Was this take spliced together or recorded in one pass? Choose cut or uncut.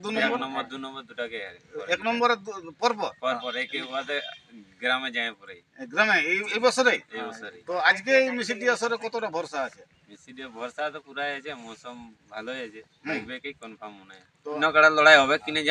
cut